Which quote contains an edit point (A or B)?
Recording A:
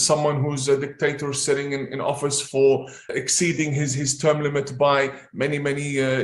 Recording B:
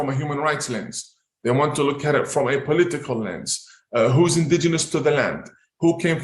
A